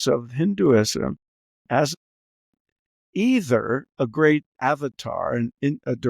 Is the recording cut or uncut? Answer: cut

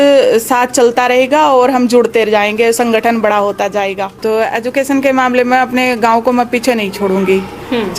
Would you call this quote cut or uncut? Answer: cut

